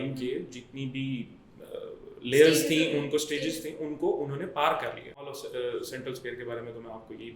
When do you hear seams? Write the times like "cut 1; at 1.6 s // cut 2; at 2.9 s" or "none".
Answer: cut 1; at 5.4 s